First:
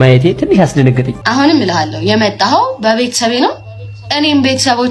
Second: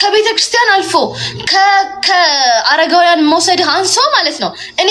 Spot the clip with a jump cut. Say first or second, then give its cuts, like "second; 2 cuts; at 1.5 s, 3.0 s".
first; 1 cut; at 1.2 s